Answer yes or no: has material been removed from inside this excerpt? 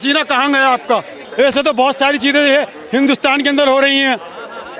yes